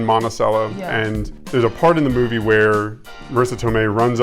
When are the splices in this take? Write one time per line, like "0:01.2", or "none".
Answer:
0:01.4